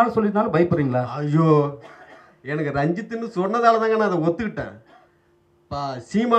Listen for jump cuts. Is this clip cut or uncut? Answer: uncut